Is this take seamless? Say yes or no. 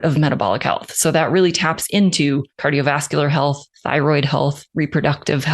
no